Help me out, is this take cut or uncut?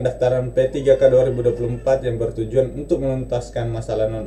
uncut